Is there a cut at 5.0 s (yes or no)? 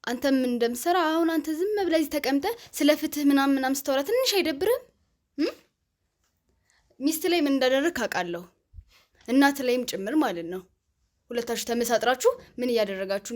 no